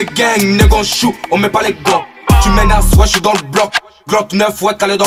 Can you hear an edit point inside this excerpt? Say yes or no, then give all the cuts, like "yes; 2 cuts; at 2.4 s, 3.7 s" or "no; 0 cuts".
no; 0 cuts